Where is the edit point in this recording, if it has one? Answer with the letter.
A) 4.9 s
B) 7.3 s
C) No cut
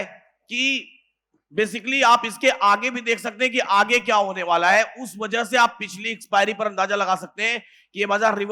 C